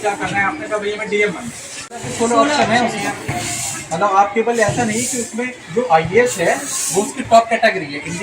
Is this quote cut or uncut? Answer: cut